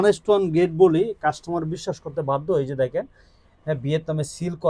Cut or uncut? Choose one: uncut